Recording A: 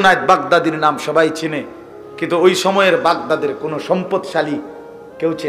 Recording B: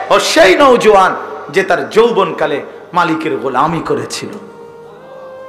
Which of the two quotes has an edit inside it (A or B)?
B